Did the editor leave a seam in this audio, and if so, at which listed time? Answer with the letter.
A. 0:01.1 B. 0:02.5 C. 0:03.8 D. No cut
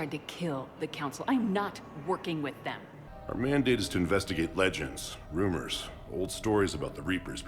B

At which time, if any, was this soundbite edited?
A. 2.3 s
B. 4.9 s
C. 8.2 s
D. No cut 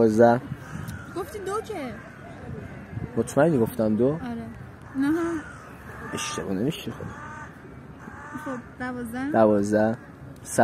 D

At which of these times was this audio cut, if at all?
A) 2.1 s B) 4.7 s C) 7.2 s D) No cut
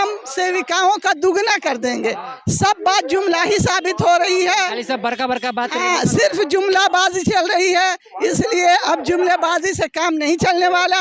D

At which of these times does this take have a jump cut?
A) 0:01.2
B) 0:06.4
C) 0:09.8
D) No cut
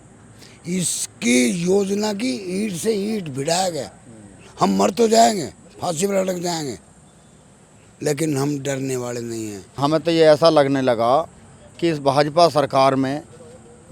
C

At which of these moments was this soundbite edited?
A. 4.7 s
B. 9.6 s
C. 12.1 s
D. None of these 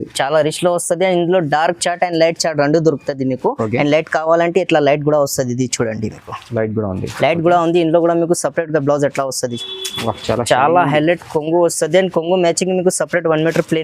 B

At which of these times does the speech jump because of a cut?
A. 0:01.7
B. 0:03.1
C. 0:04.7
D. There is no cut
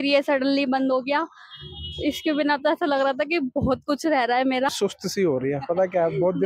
C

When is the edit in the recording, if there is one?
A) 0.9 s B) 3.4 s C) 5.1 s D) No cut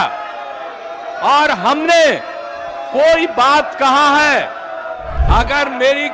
C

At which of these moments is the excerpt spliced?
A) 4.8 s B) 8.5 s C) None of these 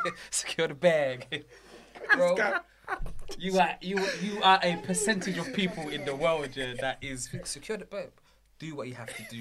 C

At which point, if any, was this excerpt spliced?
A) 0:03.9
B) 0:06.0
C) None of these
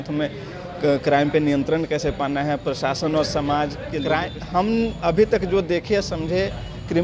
A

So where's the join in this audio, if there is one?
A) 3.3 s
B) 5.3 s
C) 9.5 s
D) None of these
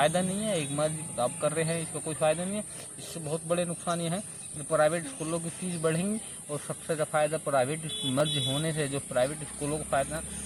D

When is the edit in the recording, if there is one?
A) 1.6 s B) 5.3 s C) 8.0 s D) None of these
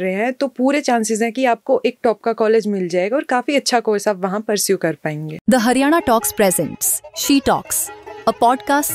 B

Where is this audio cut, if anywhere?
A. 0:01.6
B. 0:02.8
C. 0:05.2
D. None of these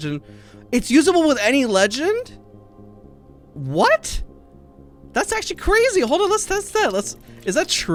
D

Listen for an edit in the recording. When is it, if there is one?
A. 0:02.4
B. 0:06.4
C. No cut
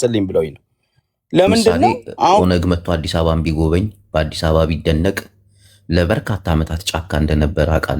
A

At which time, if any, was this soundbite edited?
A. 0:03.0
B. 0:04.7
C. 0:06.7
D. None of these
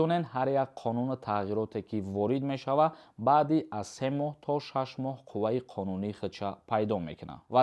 D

